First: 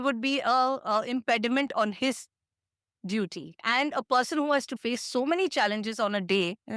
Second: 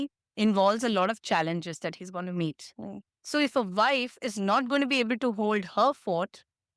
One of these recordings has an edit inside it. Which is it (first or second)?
first